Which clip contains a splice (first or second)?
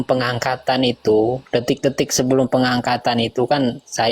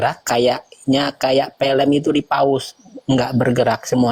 first